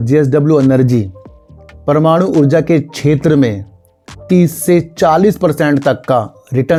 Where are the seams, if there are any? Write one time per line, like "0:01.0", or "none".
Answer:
none